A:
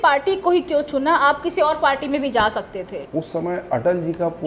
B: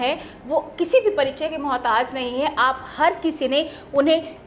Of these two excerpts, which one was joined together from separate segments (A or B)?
A